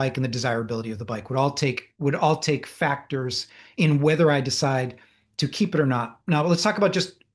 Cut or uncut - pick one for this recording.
uncut